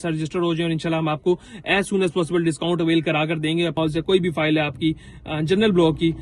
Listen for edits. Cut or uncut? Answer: cut